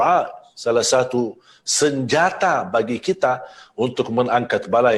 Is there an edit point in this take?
no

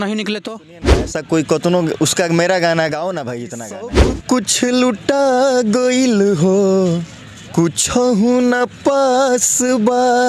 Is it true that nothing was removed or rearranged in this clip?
no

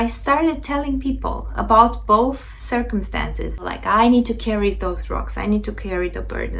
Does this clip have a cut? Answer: yes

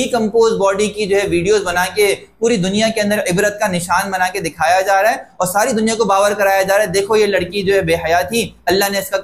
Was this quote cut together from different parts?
no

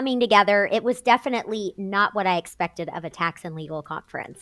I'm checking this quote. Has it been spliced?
no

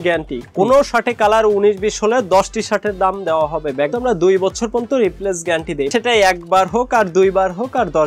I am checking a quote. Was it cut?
yes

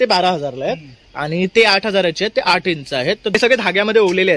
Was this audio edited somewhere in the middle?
yes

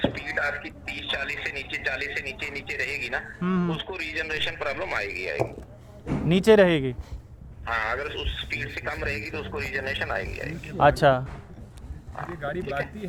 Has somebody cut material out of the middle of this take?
no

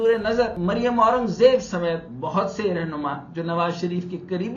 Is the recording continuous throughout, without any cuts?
yes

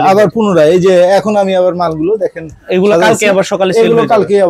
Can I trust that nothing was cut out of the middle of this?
yes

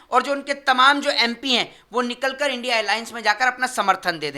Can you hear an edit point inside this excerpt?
no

